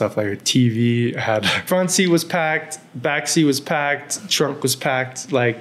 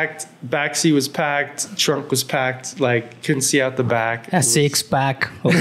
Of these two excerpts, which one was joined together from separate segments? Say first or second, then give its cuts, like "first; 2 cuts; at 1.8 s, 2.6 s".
first; 1 cut; at 1.6 s